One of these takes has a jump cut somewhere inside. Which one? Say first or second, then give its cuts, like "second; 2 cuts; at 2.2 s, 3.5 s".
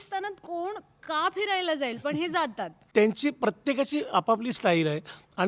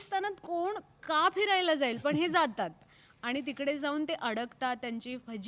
first; 1 cut; at 2.8 s